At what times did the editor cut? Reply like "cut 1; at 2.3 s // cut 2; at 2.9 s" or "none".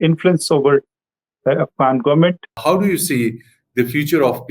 cut 1; at 2.6 s